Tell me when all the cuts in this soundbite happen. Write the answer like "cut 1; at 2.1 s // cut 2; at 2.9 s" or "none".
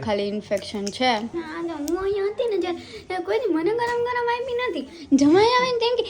cut 1; at 1.3 s